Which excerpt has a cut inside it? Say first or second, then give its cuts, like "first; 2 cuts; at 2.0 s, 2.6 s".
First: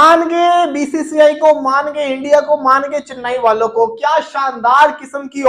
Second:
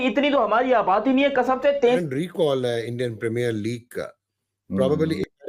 second; 1 cut; at 2.0 s